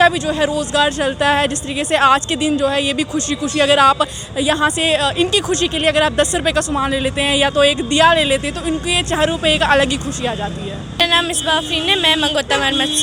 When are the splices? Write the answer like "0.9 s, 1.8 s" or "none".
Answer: none